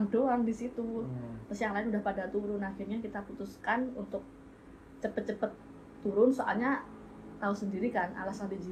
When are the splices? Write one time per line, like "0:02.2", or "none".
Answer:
none